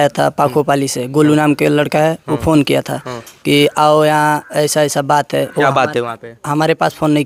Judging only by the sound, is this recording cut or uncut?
uncut